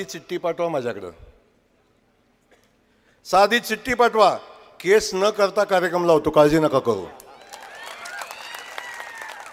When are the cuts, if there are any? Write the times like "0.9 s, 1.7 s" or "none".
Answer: none